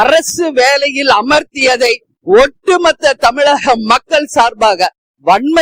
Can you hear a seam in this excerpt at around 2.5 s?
no; 0 cuts

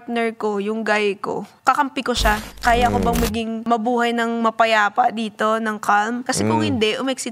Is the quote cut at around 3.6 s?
yes; 4 cuts; at 1.5 s, 2.5 s, 3.6 s, 6.2 s

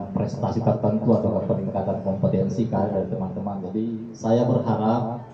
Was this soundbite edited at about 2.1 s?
no; 1 cut; at 3.9 s

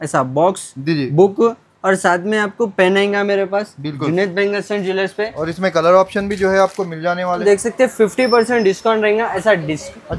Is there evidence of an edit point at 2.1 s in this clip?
no; 1 cut; at 7.4 s

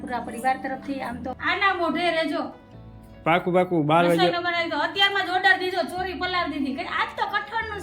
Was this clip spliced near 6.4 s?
no; 1 cut; at 1.4 s

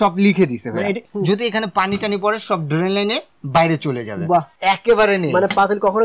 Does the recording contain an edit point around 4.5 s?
yes; 2 cuts; at 1.0 s, 4.5 s

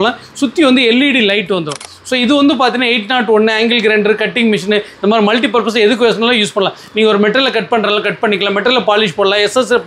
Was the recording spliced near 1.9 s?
yes; 1 cut; at 1.9 s

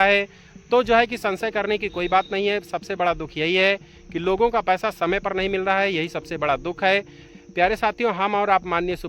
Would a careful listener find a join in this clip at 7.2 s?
yes; 1 cut; at 7.2 s

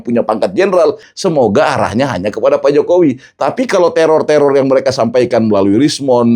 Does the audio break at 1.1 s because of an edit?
yes; 1 cut; at 1.1 s

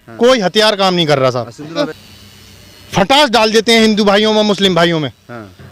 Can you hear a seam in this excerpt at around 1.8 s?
yes; 1 cut; at 1.8 s

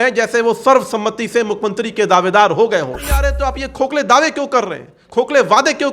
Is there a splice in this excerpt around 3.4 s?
yes; 1 cut; at 3.4 s

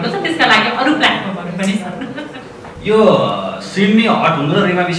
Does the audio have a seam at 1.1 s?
no; 1 cut; at 2.8 s

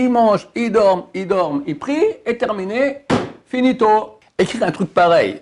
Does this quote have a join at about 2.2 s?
no; 1 cut; at 4.2 s

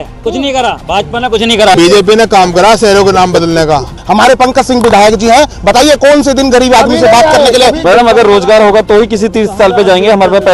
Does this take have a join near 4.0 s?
yes; 3 cuts; at 1.7 s, 4.0 s, 7.8 s

